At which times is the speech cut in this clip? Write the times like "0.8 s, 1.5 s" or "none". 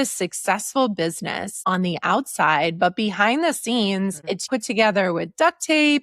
1.6 s, 4.5 s